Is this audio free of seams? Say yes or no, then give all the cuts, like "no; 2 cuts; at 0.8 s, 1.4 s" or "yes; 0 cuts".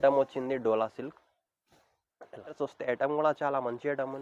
no; 1 cut; at 2.6 s